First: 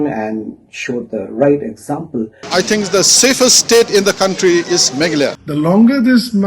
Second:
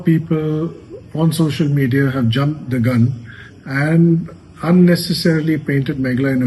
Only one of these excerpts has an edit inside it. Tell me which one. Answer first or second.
first